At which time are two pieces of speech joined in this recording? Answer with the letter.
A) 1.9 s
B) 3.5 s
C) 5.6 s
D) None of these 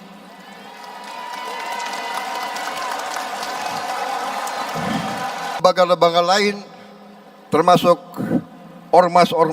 C